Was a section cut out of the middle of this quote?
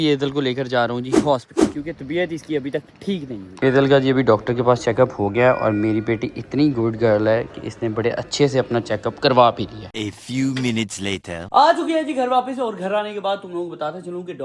no; 0 cuts

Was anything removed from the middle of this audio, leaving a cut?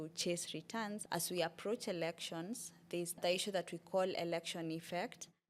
yes; 1 cut; at 1.0 s

